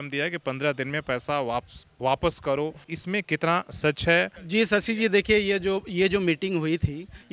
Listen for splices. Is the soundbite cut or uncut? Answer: cut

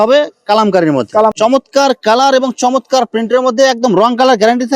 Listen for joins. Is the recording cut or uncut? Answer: cut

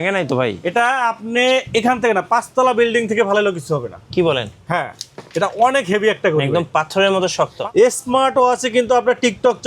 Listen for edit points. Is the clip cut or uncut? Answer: cut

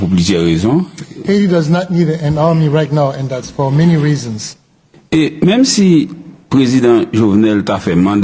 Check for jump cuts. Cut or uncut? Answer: cut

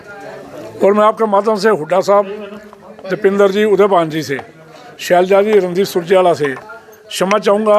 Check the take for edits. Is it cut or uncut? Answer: uncut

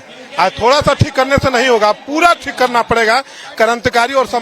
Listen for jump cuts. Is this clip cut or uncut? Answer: uncut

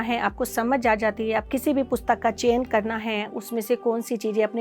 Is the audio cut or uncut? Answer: cut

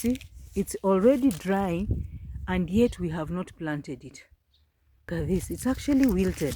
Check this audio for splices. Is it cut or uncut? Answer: cut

